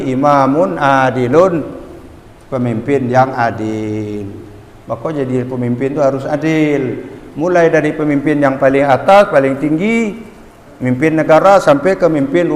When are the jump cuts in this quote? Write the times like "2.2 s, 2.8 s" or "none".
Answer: none